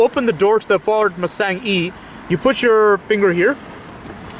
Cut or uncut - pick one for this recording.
uncut